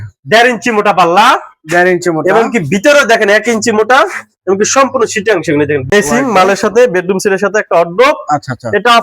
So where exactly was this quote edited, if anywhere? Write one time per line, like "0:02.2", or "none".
0:05.9